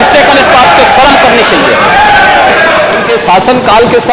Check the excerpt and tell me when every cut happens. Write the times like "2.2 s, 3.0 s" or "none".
3.1 s